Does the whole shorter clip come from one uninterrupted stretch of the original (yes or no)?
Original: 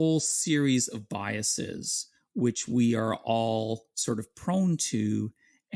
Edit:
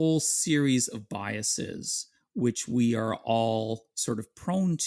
yes